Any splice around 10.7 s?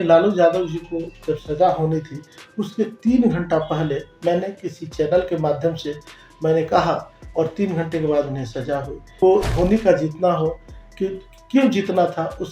no; 1 cut; at 9.2 s

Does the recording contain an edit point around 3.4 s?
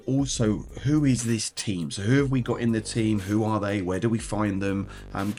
no; 0 cuts

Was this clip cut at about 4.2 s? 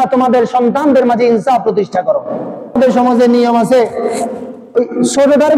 no; 1 cut; at 2.7 s

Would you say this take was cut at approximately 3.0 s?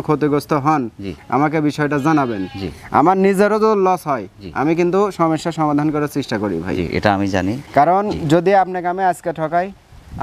no; 0 cuts

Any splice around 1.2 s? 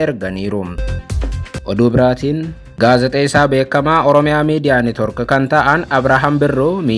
yes; 2 cuts; at 1.2 s, 2.6 s

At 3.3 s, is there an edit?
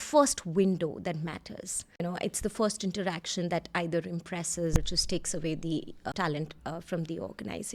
no; 2 cuts; at 2.0 s, 6.1 s

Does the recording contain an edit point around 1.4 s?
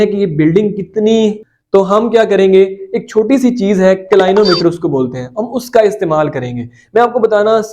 yes; 1 cut; at 1.4 s

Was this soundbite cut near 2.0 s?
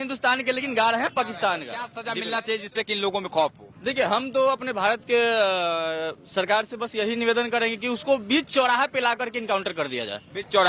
yes; 1 cut; at 2.0 s

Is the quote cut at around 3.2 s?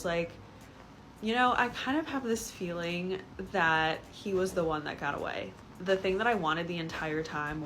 no; 1 cut; at 5.5 s

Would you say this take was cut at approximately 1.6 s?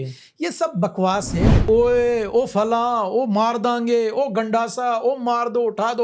yes; 1 cut; at 1.6 s

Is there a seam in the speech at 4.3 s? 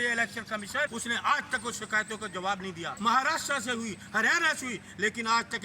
no; 2 cuts; at 0.9 s, 2.9 s

